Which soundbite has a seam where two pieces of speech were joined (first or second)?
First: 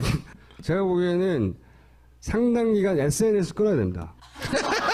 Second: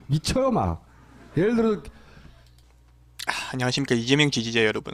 second